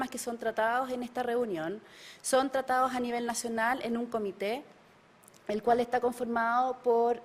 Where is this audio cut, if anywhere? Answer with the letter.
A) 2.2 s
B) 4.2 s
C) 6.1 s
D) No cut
A